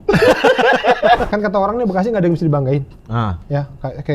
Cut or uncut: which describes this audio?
cut